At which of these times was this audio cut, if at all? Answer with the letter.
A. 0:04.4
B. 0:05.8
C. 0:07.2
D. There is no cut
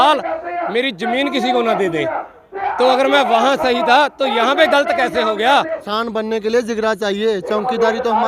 B